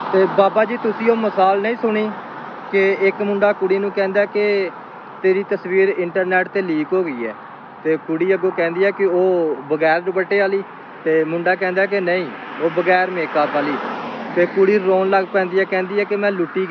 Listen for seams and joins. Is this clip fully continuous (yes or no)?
yes